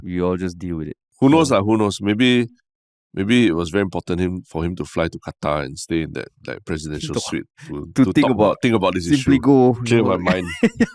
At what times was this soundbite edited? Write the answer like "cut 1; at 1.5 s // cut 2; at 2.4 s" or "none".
cut 1; at 1.0 s

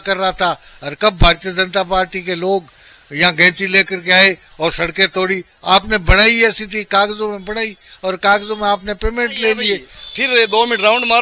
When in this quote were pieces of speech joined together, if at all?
cut 1; at 10.0 s

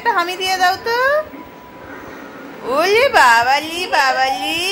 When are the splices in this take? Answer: none

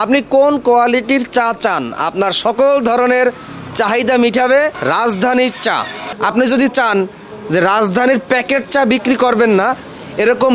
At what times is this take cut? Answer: none

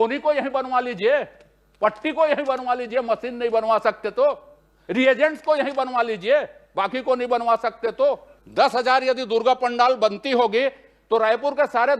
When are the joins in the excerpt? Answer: cut 1; at 8.3 s

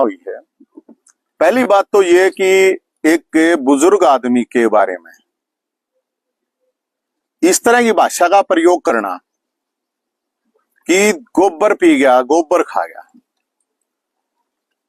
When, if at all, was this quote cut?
none

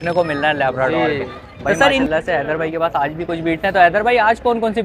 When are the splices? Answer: cut 1; at 2.1 s

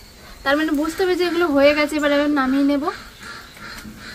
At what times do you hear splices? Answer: none

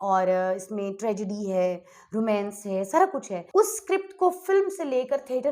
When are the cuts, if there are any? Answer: cut 1; at 3.4 s

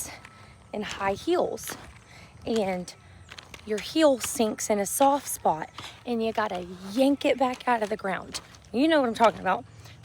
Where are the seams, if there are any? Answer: none

